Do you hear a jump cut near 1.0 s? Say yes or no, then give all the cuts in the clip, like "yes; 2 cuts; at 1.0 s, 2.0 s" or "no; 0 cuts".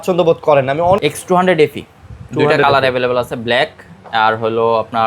yes; 1 cut; at 1.0 s